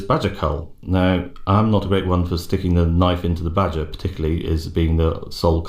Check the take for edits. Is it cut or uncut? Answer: cut